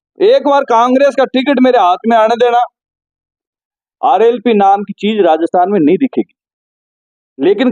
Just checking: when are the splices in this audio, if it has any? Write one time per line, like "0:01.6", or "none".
none